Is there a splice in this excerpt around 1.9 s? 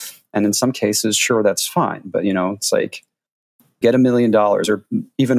no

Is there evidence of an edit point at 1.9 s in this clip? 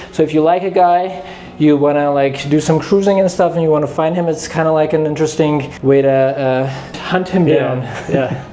no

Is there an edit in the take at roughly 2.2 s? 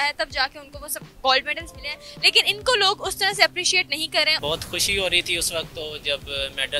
no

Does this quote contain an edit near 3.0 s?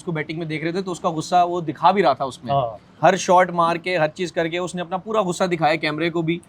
no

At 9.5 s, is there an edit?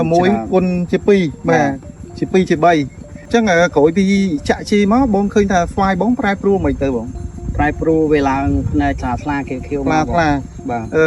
no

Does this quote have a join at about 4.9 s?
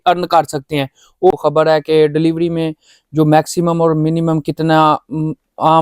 no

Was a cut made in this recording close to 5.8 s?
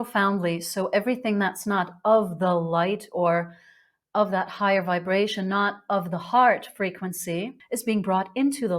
no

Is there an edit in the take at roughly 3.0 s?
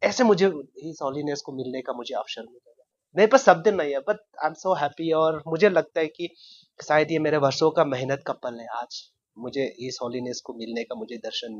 yes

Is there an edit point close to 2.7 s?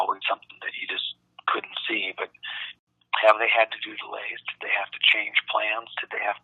yes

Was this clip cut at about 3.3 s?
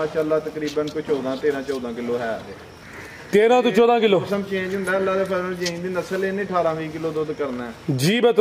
no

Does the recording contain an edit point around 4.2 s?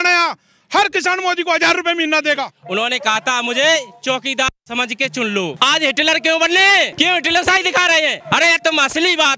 no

